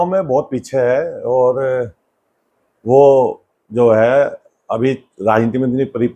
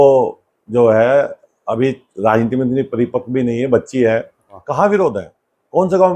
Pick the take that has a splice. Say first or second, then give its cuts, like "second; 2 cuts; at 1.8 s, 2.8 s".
second; 1 cut; at 4.6 s